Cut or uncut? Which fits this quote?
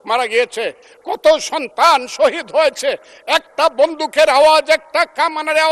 uncut